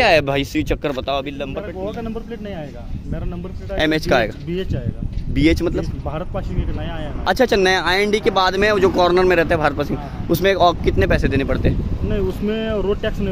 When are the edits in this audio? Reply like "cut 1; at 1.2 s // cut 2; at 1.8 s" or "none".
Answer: cut 1; at 1.5 s